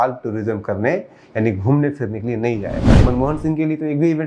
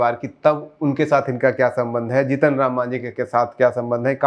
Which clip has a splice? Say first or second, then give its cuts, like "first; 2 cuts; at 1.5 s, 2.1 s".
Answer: first; 1 cut; at 3.0 s